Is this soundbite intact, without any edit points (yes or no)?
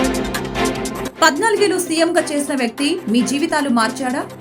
no